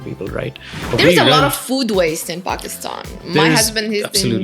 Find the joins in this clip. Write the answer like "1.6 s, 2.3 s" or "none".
0.9 s

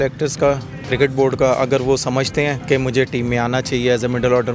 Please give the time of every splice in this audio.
2.6 s

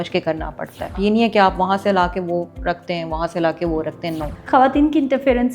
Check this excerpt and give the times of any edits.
1.0 s, 4.3 s

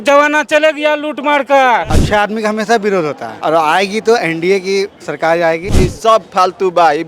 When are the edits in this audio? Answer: 1.9 s, 3.3 s, 5.7 s

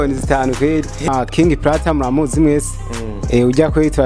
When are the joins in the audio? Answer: 1.1 s

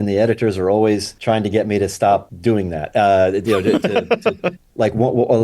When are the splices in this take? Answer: 1.1 s, 2.3 s

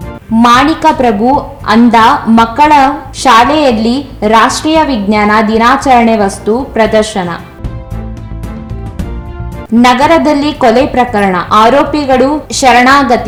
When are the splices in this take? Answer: none

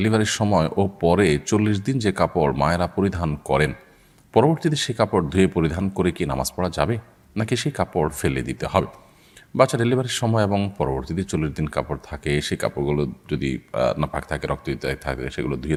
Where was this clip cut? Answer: none

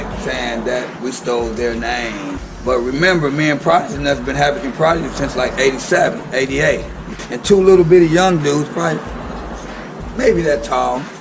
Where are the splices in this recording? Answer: 2.5 s, 7.0 s

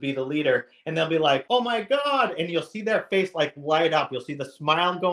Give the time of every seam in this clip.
1.4 s

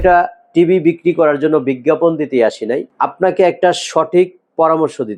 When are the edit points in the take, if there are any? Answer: none

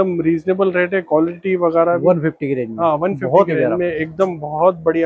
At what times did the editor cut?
none

